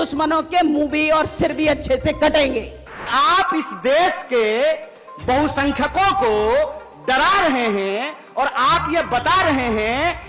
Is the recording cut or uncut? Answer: cut